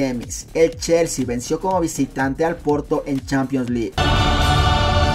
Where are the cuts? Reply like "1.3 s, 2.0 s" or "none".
3.9 s